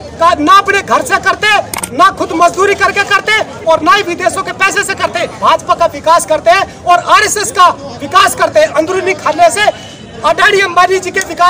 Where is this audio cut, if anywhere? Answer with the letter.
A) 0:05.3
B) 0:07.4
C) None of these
A